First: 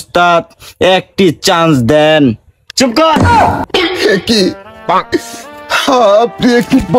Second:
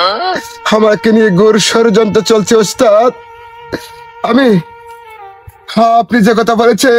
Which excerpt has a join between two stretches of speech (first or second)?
first